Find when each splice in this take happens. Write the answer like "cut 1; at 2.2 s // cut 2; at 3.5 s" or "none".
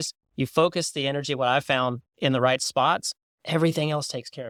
none